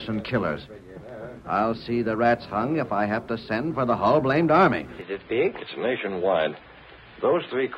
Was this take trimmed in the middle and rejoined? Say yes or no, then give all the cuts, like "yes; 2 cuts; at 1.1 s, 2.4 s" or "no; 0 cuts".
yes; 1 cut; at 4.9 s